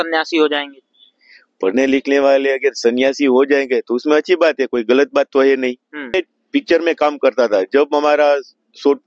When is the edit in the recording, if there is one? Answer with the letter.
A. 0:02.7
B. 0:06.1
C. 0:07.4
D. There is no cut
B